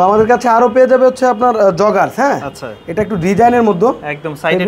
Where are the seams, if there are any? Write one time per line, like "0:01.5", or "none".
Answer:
none